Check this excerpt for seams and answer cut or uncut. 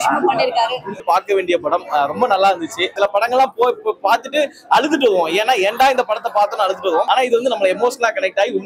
cut